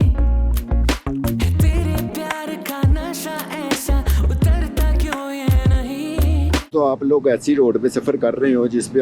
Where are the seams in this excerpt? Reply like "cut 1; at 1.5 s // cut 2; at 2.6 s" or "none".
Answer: cut 1; at 6.7 s